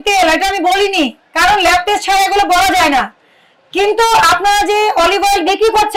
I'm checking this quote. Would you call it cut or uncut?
uncut